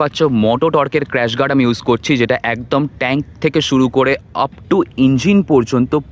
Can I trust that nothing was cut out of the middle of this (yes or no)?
yes